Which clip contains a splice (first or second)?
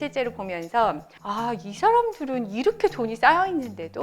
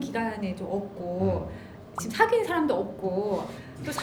first